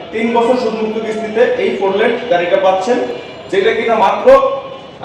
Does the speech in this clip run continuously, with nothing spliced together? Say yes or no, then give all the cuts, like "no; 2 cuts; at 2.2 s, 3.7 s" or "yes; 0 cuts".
yes; 0 cuts